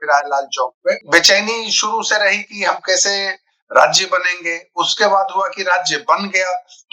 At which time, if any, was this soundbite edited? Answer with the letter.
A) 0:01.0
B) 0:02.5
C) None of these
A